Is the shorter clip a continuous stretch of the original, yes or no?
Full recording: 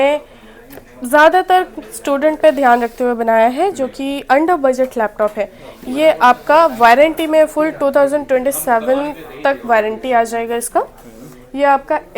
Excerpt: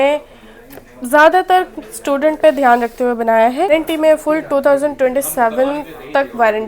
no